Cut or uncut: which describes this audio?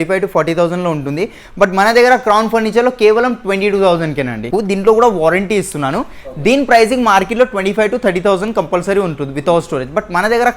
cut